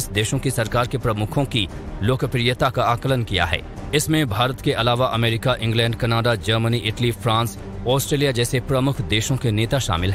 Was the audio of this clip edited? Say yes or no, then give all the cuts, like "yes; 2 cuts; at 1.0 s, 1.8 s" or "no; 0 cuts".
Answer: no; 0 cuts